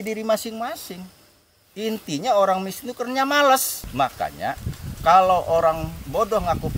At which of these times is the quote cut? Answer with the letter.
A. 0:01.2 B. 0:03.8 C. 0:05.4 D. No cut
B